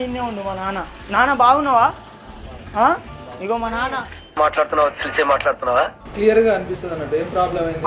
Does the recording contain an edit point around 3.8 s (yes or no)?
no